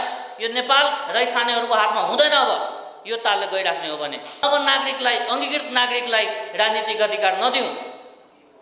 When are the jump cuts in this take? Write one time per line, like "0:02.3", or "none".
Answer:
0:04.4